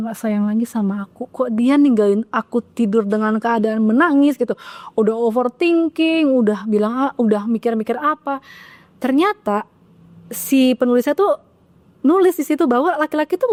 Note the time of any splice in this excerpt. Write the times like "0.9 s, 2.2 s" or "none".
none